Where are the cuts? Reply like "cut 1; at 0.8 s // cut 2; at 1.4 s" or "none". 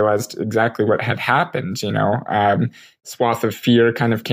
cut 1; at 2.8 s